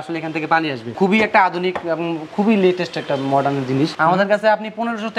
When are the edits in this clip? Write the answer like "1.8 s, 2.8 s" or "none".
0.9 s, 3.9 s